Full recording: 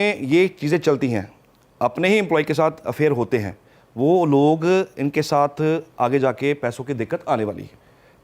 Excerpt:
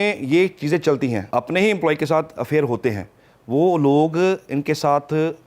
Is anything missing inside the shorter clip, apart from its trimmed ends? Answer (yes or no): yes